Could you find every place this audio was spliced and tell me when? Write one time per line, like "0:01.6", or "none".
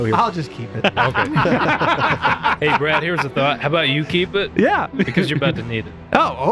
none